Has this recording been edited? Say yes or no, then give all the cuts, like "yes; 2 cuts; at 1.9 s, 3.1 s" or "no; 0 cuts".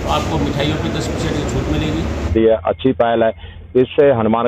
yes; 1 cut; at 2.3 s